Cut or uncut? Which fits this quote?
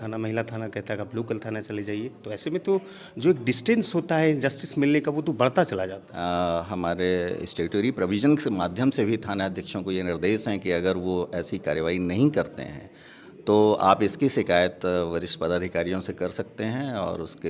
cut